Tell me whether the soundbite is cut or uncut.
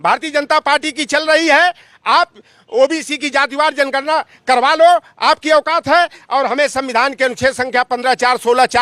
uncut